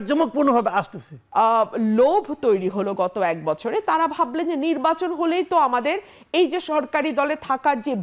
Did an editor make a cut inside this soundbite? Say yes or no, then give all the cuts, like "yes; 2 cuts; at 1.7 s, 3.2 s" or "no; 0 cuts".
yes; 1 cut; at 1.1 s